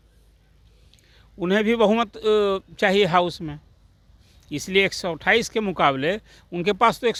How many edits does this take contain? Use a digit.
0